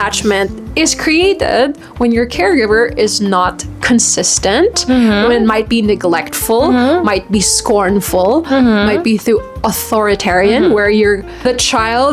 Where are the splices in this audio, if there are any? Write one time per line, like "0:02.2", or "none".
none